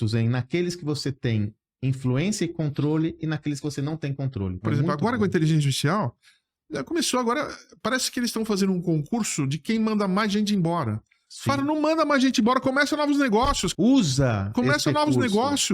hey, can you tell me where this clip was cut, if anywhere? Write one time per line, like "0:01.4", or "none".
0:04.6
0:13.7